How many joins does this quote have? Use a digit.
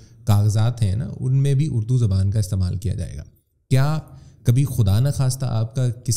0